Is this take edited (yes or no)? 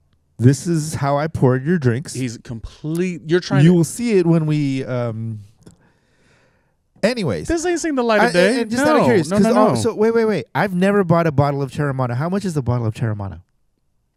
no